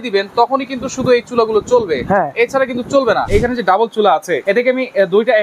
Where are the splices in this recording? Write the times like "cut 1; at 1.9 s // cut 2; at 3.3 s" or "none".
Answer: cut 1; at 3.2 s // cut 2; at 4.3 s